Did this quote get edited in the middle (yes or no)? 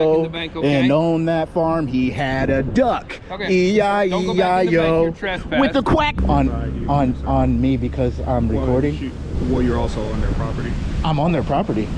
yes